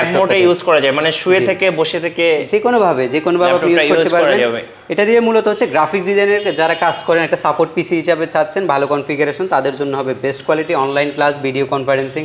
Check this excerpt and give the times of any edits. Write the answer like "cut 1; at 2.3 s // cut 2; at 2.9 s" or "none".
none